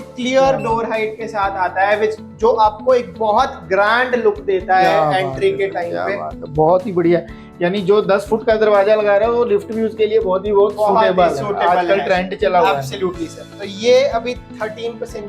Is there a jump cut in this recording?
no; 0 cuts

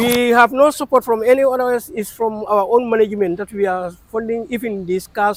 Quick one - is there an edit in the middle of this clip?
no; 0 cuts

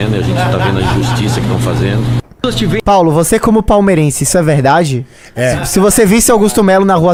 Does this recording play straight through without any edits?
yes; 0 cuts

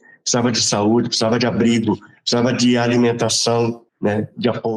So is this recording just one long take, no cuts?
no; 1 cut; at 3.9 s

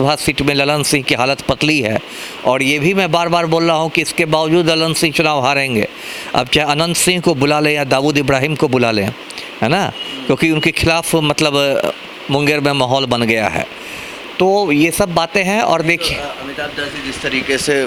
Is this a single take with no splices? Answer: yes; 0 cuts

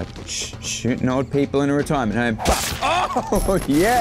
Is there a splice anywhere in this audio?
no; 0 cuts

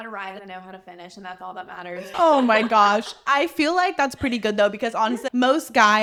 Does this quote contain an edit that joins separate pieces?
no; 0 cuts

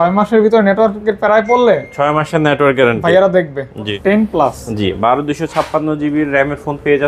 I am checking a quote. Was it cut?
yes; 1 cut; at 3.9 s

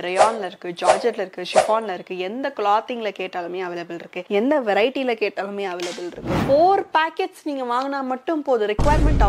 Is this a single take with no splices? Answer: no; 1 cut; at 6.4 s

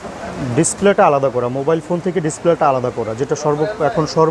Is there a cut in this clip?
no; 0 cuts

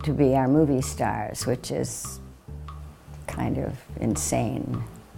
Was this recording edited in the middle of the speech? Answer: no; 0 cuts

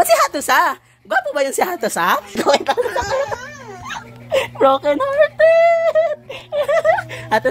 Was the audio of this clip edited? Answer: yes; 1 cut; at 2.3 s

